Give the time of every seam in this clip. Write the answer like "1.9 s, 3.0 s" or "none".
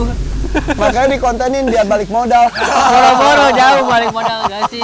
none